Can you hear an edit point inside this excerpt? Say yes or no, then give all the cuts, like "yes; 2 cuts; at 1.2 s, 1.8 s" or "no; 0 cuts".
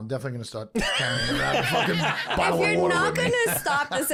no; 0 cuts